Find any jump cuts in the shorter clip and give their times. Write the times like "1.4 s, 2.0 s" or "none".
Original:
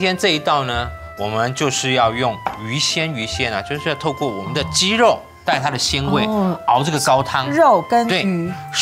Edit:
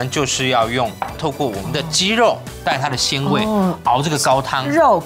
1.2 s